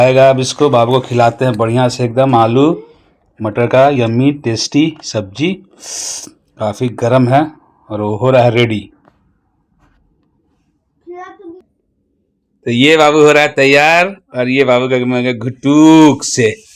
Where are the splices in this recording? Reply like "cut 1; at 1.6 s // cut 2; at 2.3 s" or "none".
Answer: none